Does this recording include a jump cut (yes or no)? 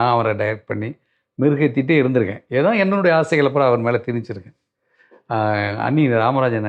no